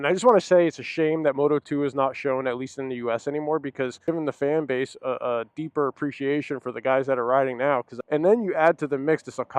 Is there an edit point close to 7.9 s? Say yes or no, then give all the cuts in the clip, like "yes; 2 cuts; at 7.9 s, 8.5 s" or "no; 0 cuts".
yes; 2 cuts; at 4.1 s, 7.9 s